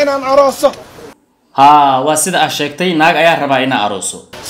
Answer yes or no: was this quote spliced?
yes